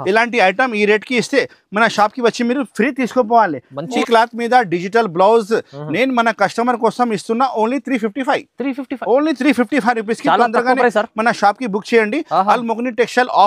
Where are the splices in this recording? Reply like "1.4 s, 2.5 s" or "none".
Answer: 4.0 s